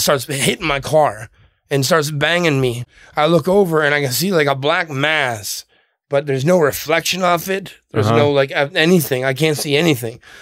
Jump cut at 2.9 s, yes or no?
yes